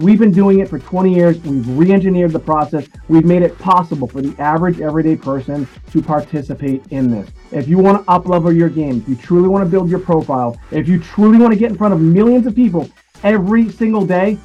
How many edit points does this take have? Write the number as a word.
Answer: zero